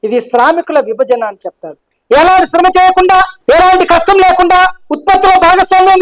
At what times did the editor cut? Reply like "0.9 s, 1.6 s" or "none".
1.7 s